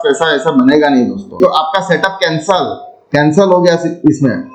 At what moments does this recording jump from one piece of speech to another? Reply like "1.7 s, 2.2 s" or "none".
1.4 s